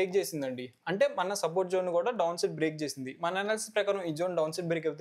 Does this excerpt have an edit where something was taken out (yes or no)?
no